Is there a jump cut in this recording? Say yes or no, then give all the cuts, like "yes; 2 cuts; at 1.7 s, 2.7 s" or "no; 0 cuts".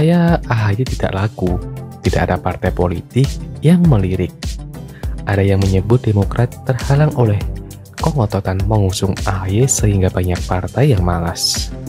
no; 0 cuts